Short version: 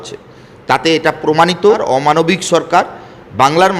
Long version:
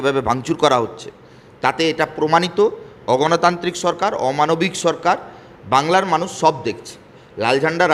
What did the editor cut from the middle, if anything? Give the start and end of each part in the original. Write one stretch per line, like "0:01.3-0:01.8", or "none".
0:02.8-0:04.1